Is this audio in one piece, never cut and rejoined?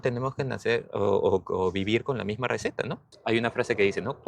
no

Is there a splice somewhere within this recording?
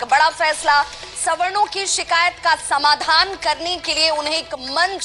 no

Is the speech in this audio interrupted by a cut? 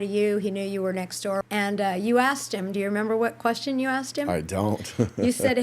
yes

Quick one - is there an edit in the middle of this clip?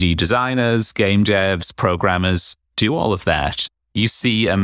yes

